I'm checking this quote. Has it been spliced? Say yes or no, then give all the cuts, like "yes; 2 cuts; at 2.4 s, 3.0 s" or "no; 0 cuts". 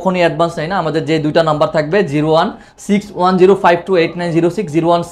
no; 0 cuts